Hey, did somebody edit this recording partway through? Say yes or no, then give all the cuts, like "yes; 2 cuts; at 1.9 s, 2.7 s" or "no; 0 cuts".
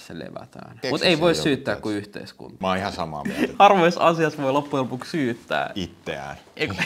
yes; 3 cuts; at 0.8 s, 2.5 s, 3.5 s